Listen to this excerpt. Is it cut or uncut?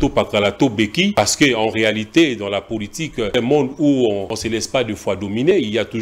cut